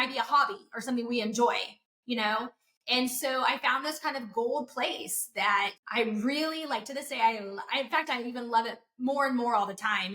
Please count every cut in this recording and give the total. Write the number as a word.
one